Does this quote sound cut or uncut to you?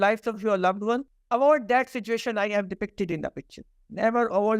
cut